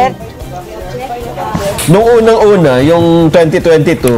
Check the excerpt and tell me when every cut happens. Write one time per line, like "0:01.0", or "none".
0:01.8